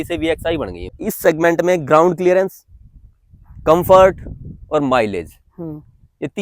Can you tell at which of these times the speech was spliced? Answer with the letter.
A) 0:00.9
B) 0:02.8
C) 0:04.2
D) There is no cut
A